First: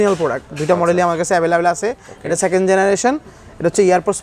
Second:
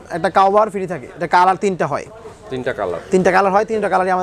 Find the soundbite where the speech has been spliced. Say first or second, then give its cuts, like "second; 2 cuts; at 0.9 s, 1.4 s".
second; 1 cut; at 1.1 s